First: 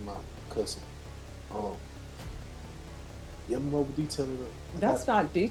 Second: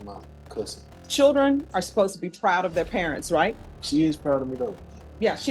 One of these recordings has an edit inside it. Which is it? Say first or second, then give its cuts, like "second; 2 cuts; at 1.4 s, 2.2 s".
second; 2 cuts; at 1.0 s, 3.7 s